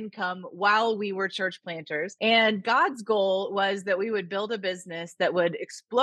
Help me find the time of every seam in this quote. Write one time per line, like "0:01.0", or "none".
0:02.1